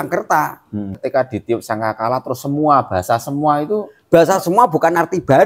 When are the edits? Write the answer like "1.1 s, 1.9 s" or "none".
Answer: 0.9 s

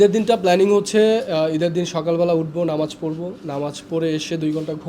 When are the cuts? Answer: none

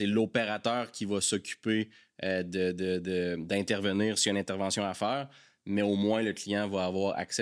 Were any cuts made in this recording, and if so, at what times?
none

